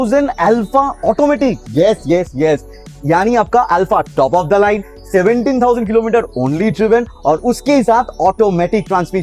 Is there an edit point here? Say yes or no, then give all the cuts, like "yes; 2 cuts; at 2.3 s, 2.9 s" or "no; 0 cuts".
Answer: no; 0 cuts